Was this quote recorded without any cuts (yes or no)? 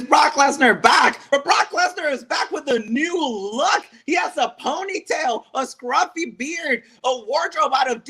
no